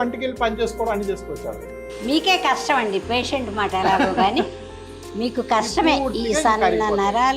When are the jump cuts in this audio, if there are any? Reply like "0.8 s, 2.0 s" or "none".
1.9 s